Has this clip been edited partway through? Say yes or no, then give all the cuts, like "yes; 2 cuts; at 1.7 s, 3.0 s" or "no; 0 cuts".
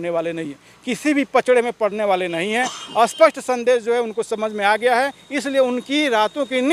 no; 0 cuts